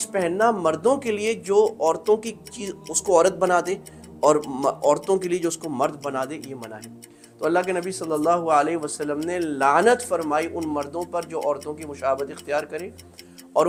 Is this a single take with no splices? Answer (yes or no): yes